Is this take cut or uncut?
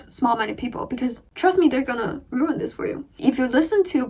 cut